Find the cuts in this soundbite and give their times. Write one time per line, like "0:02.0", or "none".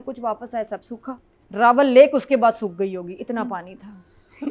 0:01.3